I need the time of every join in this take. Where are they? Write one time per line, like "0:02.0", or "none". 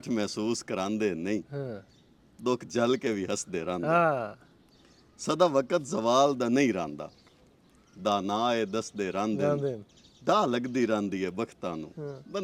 none